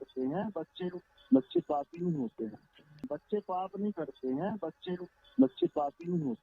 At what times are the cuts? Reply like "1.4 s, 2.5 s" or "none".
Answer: 3.0 s